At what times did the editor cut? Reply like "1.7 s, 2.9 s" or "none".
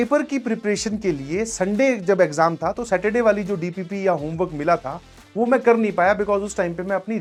none